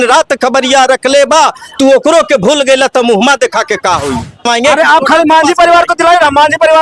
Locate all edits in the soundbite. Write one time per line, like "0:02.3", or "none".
0:04.5

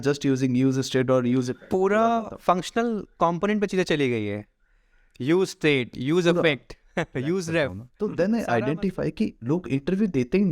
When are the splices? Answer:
0:07.8

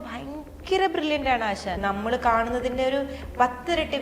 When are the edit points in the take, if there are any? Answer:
0:01.8

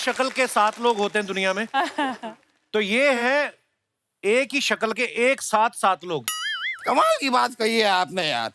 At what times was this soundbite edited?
none

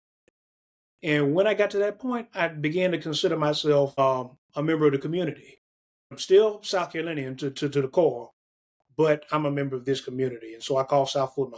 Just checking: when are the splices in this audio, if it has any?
0:04.0
0:06.2

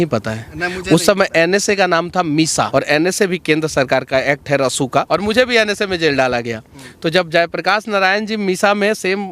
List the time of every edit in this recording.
0:02.7
0:05.1

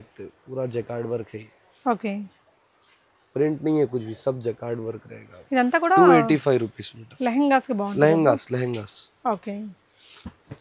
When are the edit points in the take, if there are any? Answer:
none

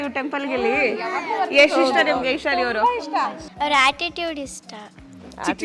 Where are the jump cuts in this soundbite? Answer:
0:03.4

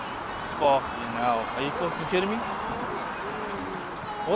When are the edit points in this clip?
none

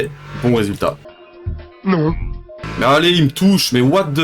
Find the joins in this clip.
0:02.6

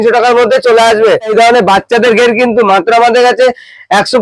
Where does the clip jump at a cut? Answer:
0:01.3

